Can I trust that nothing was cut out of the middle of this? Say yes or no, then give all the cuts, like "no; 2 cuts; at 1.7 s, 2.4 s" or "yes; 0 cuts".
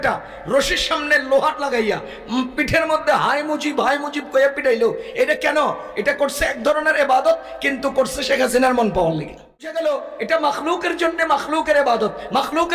no; 1 cut; at 9.7 s